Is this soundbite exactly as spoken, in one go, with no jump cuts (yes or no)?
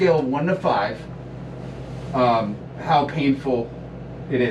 yes